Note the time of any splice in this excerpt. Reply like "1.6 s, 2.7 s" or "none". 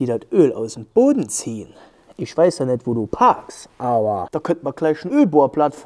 none